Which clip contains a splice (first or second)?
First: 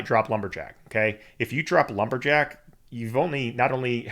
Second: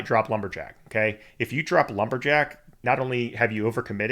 second